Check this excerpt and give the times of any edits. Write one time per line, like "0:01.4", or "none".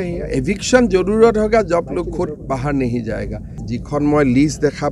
0:03.5